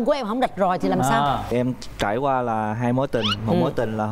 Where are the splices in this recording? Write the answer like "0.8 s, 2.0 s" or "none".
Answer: 1.5 s